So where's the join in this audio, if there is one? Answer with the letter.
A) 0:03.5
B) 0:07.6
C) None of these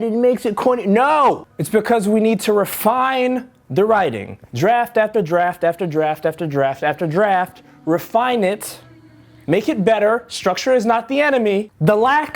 C